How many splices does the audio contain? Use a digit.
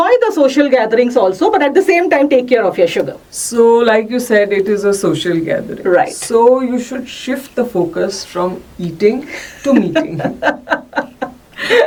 0